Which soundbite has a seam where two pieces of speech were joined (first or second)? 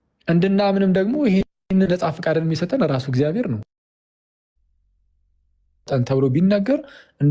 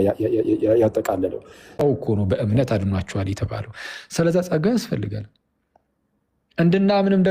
second